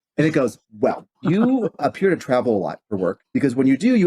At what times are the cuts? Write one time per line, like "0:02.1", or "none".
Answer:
0:01.1
0:01.8
0:03.2

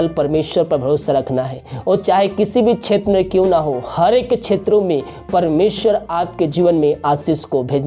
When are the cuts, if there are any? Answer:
none

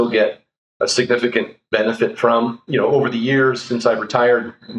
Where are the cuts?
0:02.7

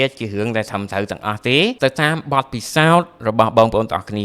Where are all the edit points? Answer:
0:01.8

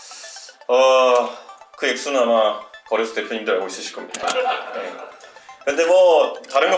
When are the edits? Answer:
none

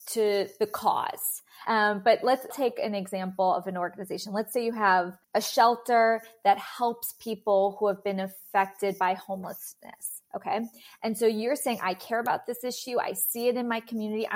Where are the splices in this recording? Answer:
0:01.6
0:02.5
0:05.2

